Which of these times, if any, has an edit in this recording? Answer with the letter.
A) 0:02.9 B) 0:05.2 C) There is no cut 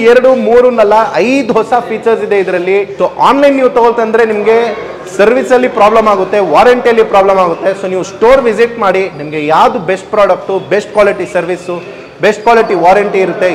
A